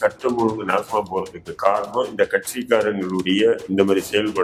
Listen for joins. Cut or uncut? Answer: uncut